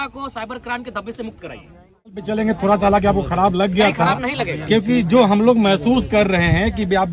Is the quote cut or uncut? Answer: cut